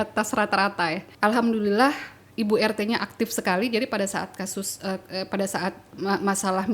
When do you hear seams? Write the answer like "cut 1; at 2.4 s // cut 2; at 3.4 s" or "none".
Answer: cut 1; at 1.1 s